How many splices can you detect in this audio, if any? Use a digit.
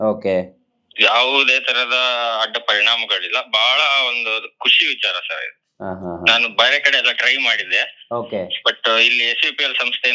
0